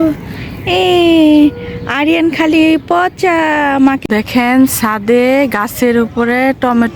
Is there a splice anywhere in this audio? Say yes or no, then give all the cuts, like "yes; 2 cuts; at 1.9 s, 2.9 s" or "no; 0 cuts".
yes; 1 cut; at 4.0 s